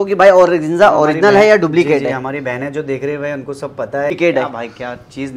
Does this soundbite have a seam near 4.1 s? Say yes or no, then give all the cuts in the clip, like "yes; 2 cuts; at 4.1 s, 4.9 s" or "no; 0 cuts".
yes; 1 cut; at 4.1 s